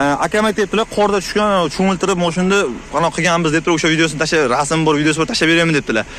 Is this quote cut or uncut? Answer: uncut